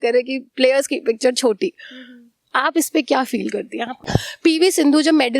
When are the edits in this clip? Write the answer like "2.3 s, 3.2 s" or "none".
4.2 s

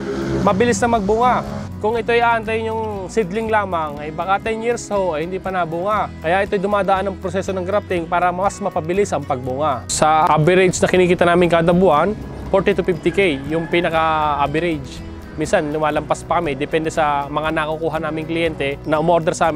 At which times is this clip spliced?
9.9 s

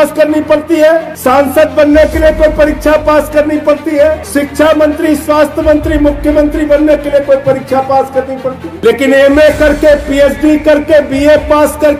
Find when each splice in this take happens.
1.1 s, 4.2 s, 8.7 s

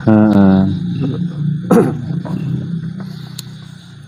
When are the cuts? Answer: none

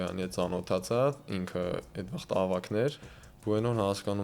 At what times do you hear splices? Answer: 3.0 s

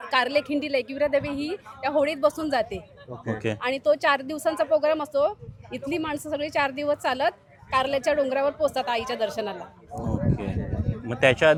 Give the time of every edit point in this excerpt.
none

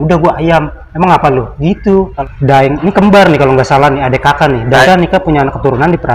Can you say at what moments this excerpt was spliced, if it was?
2.2 s, 4.9 s

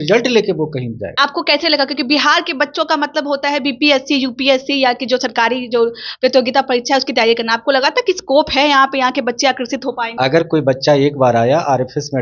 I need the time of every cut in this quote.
1.1 s, 10.1 s

